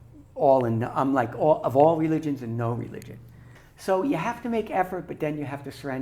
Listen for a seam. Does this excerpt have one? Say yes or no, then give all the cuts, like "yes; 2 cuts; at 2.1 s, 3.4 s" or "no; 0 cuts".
yes; 1 cut; at 3.4 s